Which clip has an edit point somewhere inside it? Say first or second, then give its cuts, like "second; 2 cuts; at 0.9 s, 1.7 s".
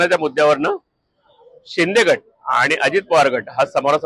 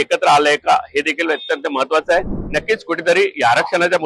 second; 1 cut; at 2.4 s